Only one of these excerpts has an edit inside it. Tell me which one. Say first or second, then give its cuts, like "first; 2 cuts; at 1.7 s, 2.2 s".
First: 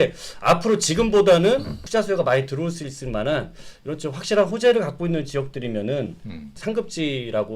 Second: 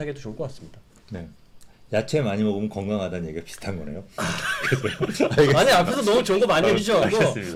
first; 1 cut; at 1.8 s